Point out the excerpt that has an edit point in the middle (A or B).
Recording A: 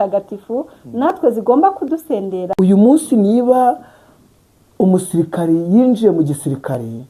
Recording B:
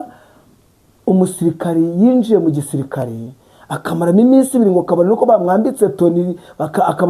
A